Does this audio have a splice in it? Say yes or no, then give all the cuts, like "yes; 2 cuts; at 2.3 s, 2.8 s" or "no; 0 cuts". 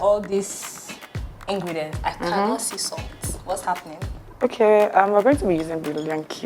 no; 0 cuts